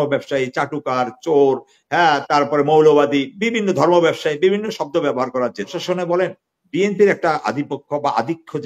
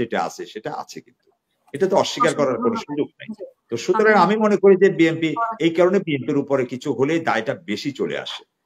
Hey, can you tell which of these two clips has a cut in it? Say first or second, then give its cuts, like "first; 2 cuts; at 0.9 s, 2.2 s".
first; 1 cut; at 5.8 s